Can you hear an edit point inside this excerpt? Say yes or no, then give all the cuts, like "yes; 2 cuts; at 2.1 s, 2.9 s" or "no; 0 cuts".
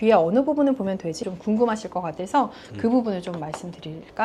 yes; 1 cut; at 1.2 s